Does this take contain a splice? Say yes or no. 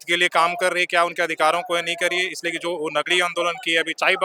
no